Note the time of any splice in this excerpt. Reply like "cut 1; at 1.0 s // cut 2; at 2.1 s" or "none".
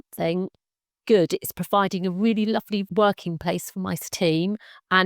cut 1; at 2.9 s // cut 2; at 4.1 s